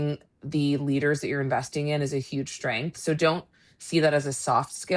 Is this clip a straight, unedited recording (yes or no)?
yes